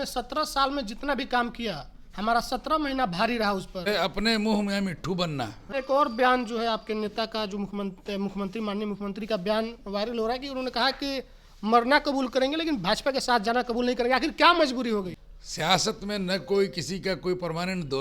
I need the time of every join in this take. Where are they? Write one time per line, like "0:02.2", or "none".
0:03.9
0:05.7
0:15.1